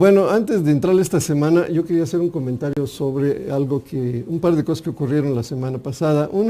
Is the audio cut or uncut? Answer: cut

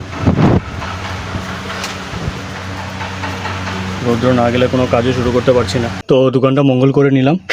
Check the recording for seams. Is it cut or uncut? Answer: cut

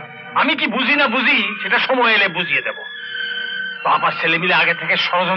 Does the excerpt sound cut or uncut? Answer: uncut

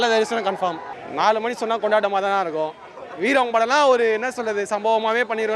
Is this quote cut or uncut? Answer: cut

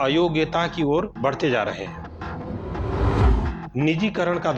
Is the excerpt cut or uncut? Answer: uncut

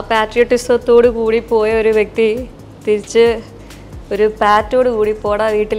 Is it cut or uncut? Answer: uncut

